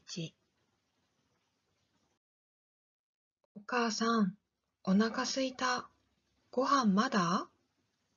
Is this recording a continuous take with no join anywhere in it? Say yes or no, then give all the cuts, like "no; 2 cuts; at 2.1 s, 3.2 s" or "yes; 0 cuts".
yes; 0 cuts